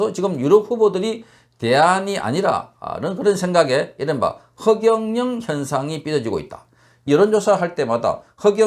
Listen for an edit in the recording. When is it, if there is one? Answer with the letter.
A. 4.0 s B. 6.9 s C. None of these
B